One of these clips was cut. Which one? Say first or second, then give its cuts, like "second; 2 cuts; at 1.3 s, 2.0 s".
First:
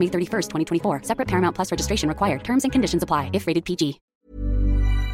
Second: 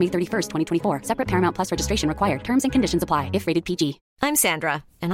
first; 1 cut; at 4.1 s